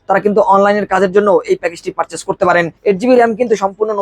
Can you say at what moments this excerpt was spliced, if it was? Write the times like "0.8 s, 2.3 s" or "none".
2.7 s